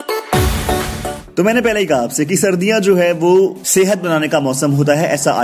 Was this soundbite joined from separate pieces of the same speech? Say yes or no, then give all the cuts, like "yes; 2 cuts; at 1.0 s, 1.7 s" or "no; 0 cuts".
yes; 1 cut; at 0.9 s